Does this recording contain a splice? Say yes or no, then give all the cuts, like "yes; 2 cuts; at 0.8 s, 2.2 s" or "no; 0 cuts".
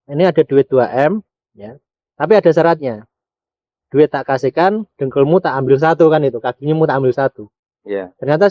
no; 0 cuts